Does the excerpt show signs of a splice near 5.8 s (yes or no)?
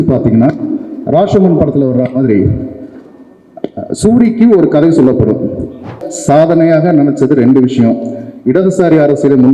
yes